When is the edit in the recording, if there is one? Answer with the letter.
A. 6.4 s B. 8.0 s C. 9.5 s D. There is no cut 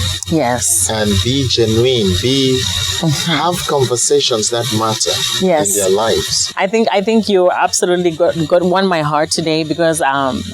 A